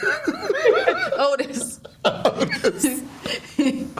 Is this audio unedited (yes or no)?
yes